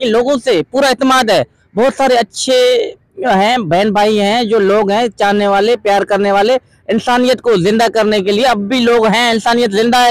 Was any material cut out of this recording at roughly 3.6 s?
no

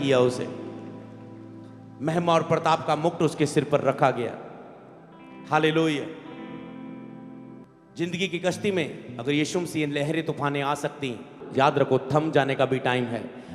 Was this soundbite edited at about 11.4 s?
yes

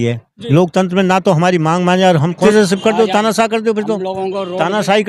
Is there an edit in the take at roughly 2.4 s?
yes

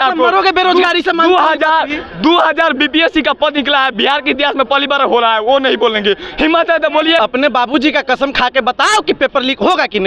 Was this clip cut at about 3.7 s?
no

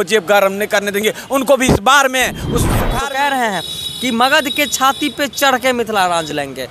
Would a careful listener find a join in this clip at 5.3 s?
no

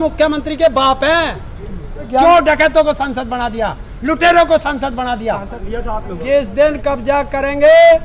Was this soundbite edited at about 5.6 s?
yes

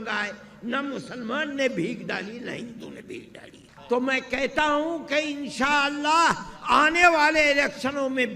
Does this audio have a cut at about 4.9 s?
no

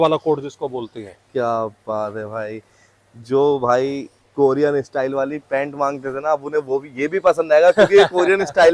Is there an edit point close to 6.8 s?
no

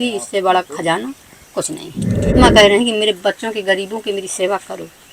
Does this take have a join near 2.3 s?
yes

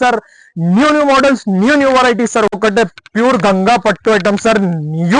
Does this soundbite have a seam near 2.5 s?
yes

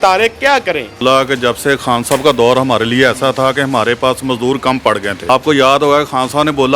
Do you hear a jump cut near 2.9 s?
no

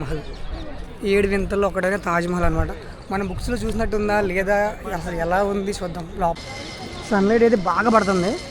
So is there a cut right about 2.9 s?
no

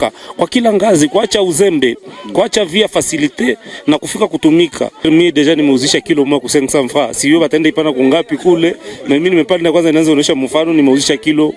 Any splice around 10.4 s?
no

